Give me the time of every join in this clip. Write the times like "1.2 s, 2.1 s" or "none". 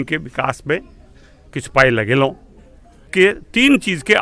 3.0 s